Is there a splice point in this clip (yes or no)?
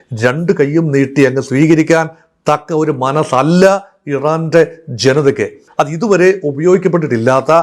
yes